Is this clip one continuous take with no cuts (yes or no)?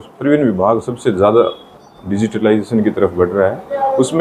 yes